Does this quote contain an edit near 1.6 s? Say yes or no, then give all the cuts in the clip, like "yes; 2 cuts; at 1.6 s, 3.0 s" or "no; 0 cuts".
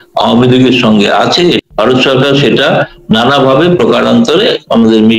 yes; 1 cut; at 1.6 s